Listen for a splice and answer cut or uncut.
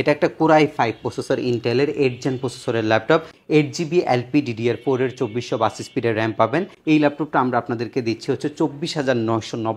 cut